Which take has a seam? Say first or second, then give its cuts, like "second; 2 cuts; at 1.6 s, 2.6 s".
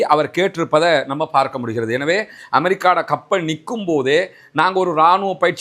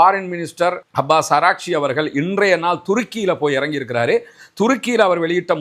first; 1 cut; at 2.4 s